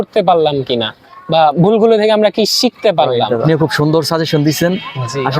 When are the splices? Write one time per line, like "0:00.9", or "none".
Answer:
0:03.4

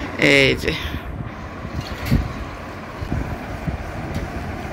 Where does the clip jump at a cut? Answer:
0:03.1

